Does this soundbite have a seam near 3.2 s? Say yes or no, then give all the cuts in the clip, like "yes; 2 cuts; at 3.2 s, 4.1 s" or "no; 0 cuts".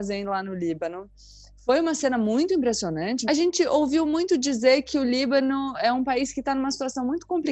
yes; 1 cut; at 3.2 s